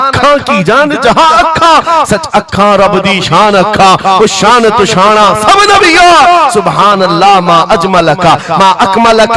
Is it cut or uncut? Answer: uncut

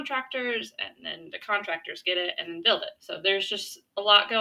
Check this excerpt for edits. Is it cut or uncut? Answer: cut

